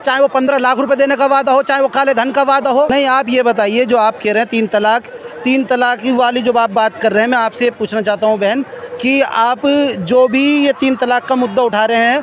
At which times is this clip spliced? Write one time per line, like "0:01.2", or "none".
none